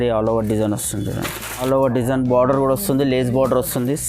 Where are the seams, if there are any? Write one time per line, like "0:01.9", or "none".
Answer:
0:01.6